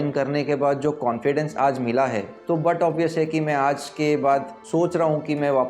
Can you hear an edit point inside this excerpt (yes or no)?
yes